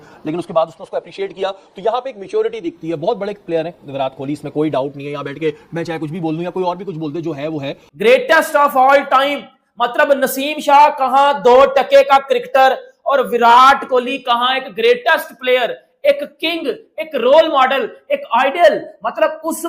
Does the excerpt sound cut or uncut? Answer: cut